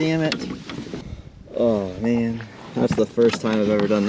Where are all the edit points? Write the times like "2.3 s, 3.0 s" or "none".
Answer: 1.0 s